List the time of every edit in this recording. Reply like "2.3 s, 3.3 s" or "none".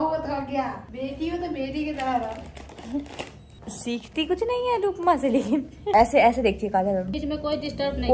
none